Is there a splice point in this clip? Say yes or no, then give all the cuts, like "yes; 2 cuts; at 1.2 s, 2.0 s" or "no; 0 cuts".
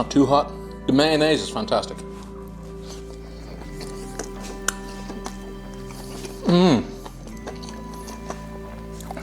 no; 0 cuts